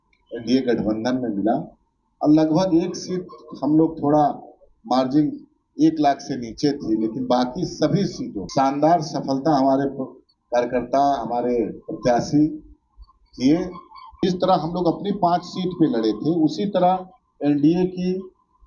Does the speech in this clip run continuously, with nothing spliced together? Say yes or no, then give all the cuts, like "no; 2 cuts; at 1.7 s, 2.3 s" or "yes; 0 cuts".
no; 2 cuts; at 8.4 s, 14.2 s